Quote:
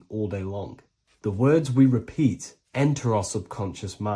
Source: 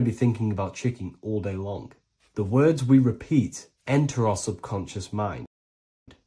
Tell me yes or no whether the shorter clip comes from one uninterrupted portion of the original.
yes